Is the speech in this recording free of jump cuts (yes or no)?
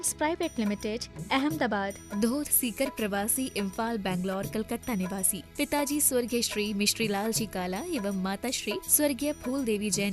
yes